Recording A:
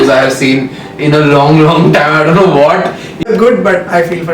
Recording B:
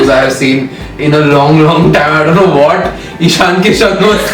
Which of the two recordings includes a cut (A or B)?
A